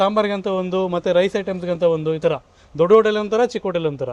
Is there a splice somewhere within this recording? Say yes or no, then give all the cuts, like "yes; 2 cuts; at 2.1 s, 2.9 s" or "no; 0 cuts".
no; 0 cuts